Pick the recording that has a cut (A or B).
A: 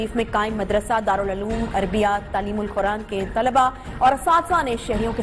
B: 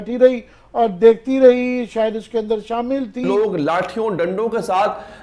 B